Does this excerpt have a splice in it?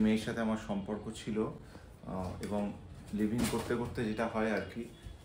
no; 0 cuts

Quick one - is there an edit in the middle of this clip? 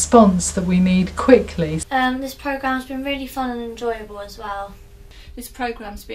yes; 2 cuts; at 1.8 s, 4.8 s

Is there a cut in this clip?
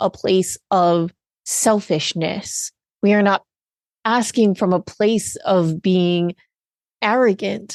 no; 0 cuts

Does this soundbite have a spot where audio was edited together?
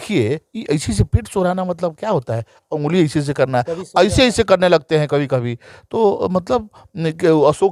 no; 0 cuts

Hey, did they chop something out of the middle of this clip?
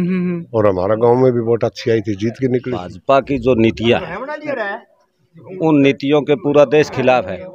yes; 1 cut; at 2.9 s

